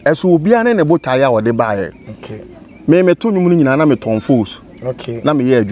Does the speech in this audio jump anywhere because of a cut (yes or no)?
no